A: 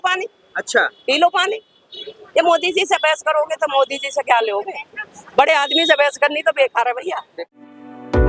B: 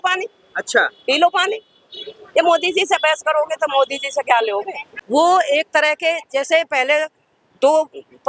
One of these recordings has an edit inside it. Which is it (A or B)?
B